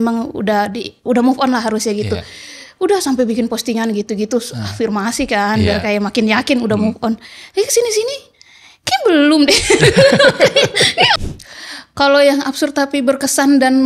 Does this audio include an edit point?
yes; 1 cut; at 11.2 s

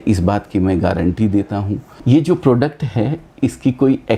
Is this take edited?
yes; 1 cut; at 1.9 s

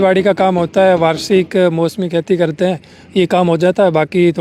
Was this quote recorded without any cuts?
yes; 0 cuts

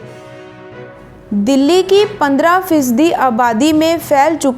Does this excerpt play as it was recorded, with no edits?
no; 1 cut; at 1.3 s

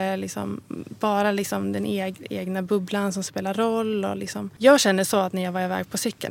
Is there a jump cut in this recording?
yes; 1 cut; at 4.4 s

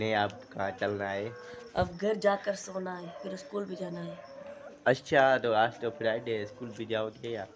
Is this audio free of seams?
yes; 0 cuts

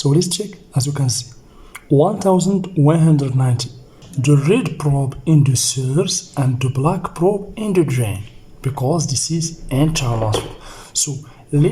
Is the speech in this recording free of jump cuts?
no; 1 cut; at 4.0 s

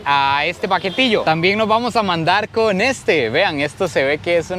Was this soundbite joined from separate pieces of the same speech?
yes; 1 cut; at 1.2 s

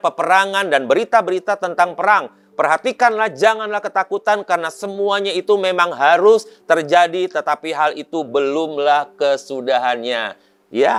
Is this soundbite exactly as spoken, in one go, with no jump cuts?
yes; 0 cuts

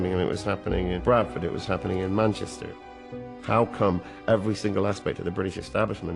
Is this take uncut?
no; 2 cuts; at 1.0 s, 3.1 s

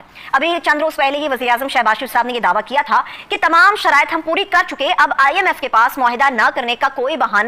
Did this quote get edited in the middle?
no; 0 cuts

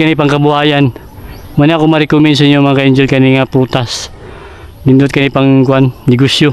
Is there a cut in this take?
no; 0 cuts

